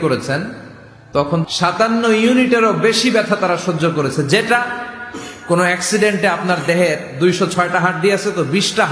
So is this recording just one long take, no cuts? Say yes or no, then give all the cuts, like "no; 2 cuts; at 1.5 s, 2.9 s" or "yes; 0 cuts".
no; 1 cut; at 1.4 s